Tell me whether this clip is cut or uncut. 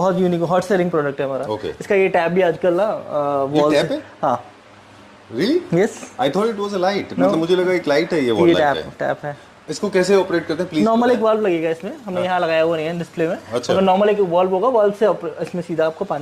uncut